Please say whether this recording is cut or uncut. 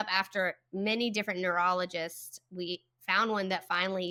uncut